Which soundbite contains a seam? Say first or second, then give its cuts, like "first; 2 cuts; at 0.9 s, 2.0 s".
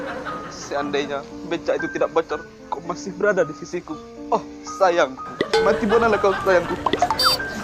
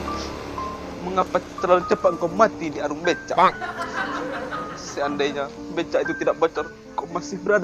first; 1 cut; at 5.7 s